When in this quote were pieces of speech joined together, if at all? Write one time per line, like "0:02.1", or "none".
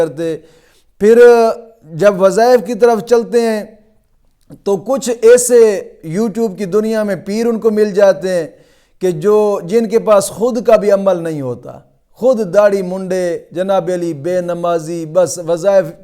none